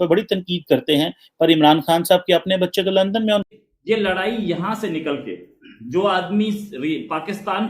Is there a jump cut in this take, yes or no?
yes